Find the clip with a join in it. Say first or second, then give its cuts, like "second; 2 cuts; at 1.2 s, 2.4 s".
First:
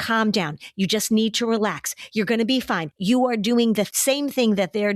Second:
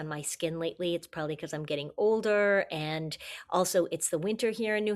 first; 2 cuts; at 2.9 s, 3.9 s